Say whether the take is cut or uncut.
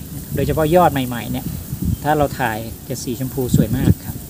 uncut